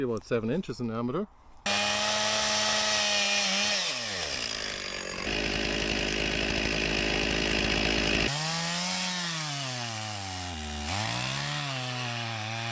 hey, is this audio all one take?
no; 3 cuts; at 1.7 s, 5.3 s, 8.3 s

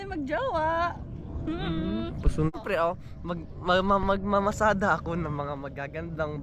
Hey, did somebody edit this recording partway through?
yes; 1 cut; at 2.5 s

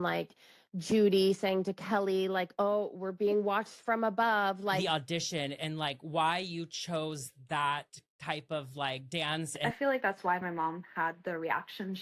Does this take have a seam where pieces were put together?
yes; 2 cuts; at 4.8 s, 9.6 s

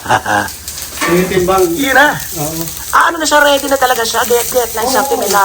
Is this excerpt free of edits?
yes; 0 cuts

